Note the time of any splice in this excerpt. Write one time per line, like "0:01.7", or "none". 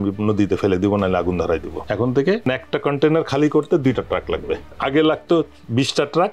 0:01.8
0:02.4
0:04.7